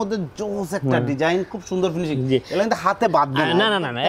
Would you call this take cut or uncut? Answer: uncut